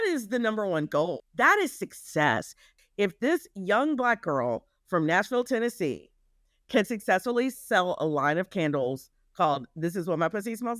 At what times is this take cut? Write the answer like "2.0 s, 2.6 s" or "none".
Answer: 1.2 s, 2.7 s